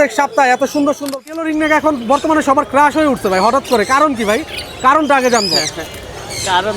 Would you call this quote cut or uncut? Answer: cut